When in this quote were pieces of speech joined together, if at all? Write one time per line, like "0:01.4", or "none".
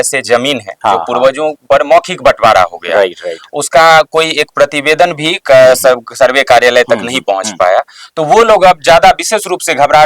none